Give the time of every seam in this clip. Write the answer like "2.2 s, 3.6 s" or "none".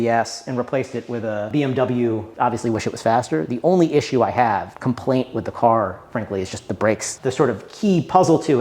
2.3 s, 7.1 s